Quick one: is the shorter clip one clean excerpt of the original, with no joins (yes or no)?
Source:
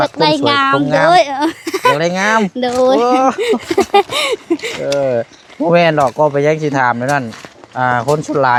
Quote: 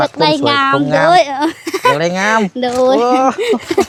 yes